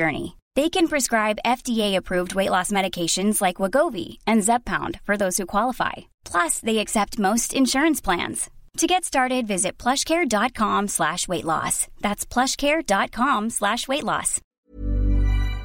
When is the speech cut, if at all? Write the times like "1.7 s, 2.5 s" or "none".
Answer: 14.7 s